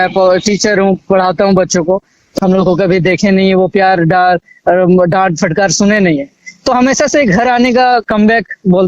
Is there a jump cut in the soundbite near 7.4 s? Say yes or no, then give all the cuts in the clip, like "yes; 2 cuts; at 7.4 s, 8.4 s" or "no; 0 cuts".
no; 1 cut; at 2.2 s